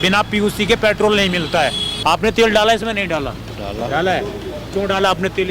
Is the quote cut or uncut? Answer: cut